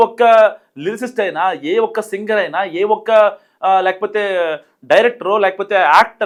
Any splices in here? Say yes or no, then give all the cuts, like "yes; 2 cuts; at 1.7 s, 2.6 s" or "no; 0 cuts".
no; 0 cuts